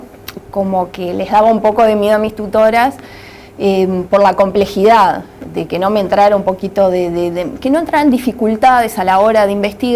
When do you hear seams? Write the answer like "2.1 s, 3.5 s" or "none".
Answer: none